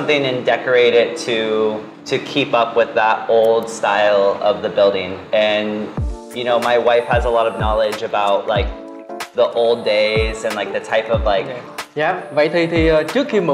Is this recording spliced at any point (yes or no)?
no